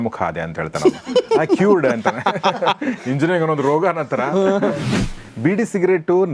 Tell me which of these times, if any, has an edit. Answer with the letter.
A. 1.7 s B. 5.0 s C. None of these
B